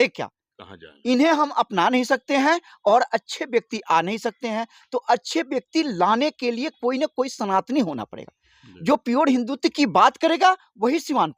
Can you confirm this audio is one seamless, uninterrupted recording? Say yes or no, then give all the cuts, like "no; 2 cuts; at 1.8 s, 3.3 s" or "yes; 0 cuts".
yes; 0 cuts